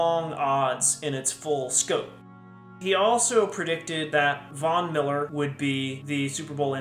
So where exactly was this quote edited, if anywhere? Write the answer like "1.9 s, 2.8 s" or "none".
2.7 s, 4.2 s, 5.6 s